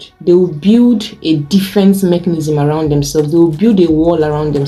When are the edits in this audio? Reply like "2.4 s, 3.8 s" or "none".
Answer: none